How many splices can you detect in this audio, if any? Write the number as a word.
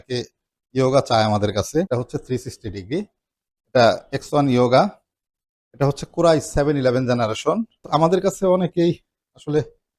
two